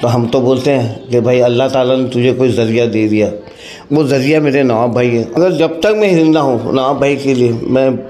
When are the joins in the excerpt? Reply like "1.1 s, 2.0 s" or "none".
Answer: 5.4 s